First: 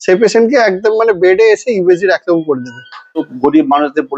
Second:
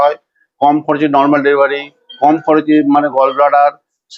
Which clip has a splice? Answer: first; 1 cut; at 3.2 s

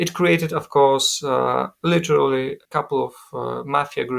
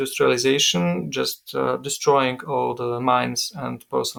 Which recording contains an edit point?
first; 1 cut; at 2.6 s

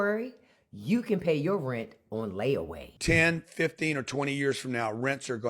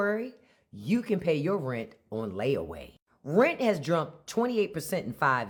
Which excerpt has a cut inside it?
first; 1 cut; at 2.9 s

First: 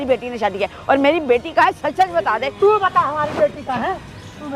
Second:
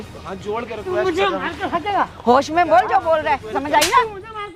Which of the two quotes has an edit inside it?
first; 1 cut; at 2.5 s

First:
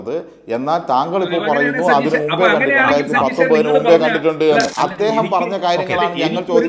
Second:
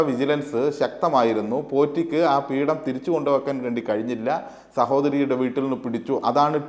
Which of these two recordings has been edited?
first; 1 cut; at 4.7 s

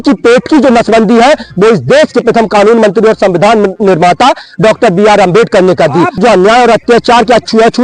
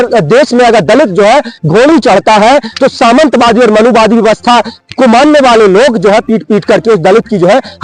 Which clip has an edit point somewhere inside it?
first; 1 cut; at 6.2 s

